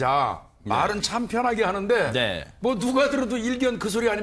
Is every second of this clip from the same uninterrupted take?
no; 1 cut; at 2.0 s

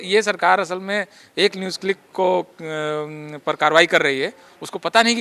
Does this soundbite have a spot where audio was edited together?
no; 0 cuts

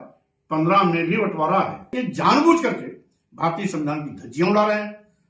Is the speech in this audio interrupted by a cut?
yes; 1 cut; at 1.9 s

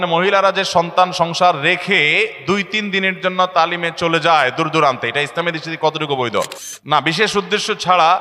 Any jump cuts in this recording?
yes; 1 cut; at 6.7 s

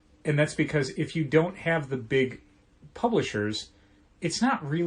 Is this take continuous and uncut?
yes; 0 cuts

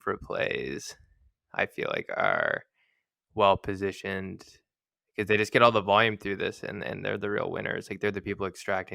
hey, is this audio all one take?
yes; 0 cuts

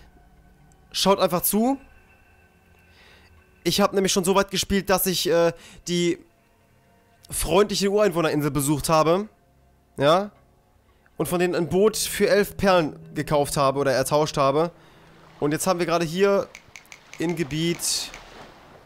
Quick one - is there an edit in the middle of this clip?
yes; 1 cut; at 17.0 s

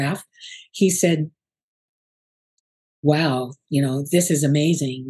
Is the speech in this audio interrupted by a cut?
no; 0 cuts

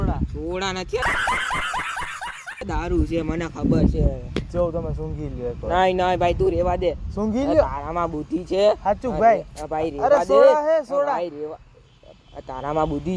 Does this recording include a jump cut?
no; 0 cuts

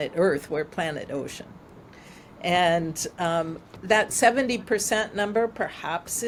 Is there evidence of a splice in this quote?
no; 0 cuts

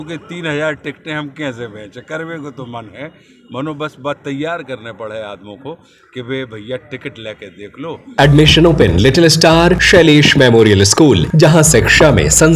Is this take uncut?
no; 3 cuts; at 8.1 s, 9.8 s, 11.3 s

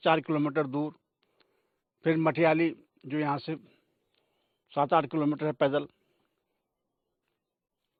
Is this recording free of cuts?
yes; 0 cuts

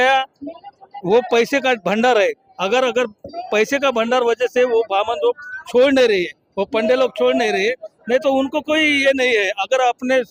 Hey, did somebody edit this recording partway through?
no; 0 cuts

